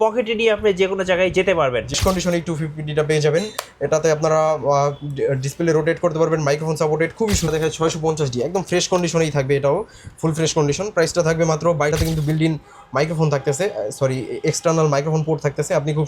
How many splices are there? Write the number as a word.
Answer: three